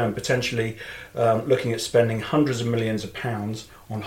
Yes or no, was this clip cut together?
no